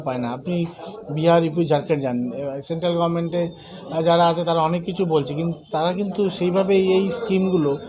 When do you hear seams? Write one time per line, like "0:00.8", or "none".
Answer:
none